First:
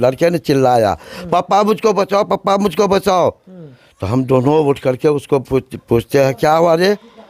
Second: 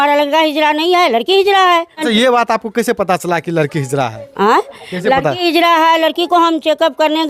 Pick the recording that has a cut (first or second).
second